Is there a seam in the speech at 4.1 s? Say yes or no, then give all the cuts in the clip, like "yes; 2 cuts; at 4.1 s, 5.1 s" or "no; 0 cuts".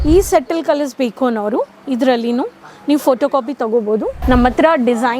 yes; 1 cut; at 4.1 s